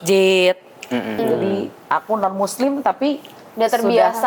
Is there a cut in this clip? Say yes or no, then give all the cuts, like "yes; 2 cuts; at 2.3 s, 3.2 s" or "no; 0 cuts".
yes; 1 cut; at 1.2 s